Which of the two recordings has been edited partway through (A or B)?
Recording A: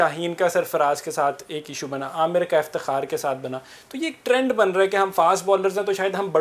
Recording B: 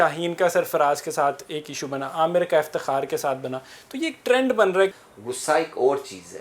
B